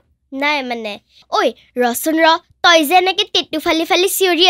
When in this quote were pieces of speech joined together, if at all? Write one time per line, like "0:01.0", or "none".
0:01.1